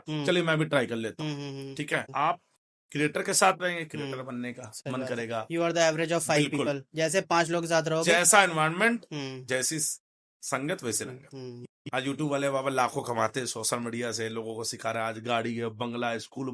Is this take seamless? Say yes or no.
no